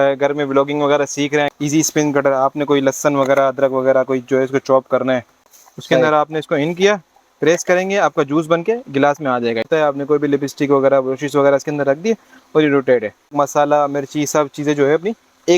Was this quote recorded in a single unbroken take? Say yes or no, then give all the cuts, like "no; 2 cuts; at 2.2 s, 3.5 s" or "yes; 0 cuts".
no; 4 cuts; at 1.5 s, 5.6 s, 9.7 s, 13.3 s